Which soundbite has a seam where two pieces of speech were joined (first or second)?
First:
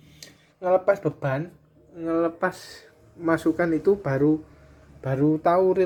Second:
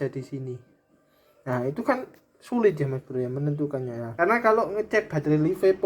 second